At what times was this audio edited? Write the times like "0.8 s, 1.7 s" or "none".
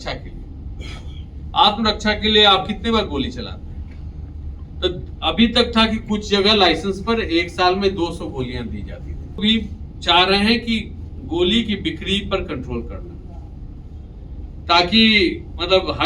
9.4 s